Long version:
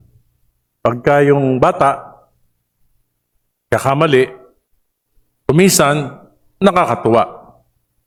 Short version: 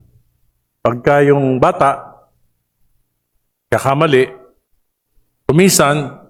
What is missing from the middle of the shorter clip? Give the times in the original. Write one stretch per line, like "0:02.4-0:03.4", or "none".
none